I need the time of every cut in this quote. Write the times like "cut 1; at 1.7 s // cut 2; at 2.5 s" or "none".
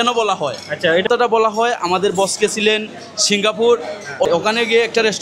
cut 1; at 1.1 s // cut 2; at 4.4 s